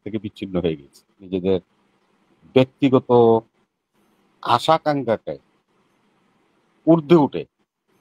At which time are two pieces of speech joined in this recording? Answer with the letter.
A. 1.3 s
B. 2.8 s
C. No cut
A